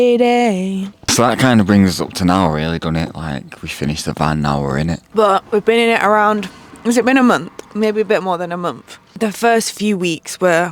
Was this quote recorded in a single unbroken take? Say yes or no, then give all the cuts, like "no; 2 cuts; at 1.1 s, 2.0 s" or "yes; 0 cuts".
yes; 0 cuts